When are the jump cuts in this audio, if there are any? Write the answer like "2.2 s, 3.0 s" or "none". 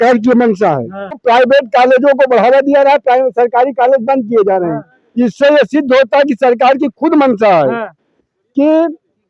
1.2 s